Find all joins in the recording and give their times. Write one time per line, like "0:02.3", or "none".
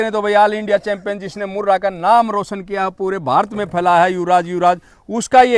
0:02.9